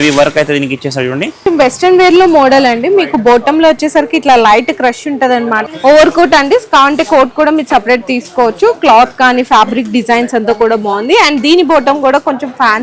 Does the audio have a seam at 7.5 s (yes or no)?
no